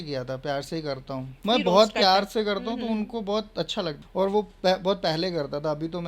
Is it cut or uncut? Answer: cut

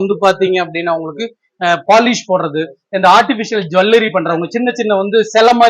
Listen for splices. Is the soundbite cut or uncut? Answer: uncut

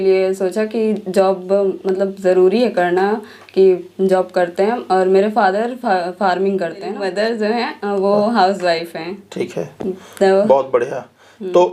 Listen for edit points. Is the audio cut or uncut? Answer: uncut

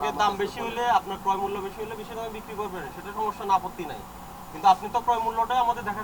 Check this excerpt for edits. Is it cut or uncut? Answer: uncut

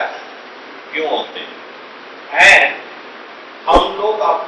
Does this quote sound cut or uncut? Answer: uncut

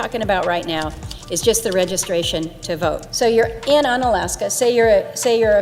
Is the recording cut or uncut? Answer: uncut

